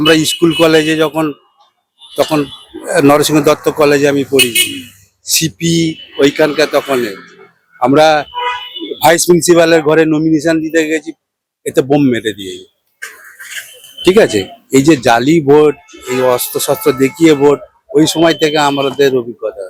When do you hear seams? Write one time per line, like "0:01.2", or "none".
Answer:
none